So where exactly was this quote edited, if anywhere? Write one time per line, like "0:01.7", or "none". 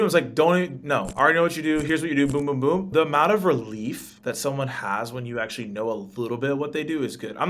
0:02.9
0:04.1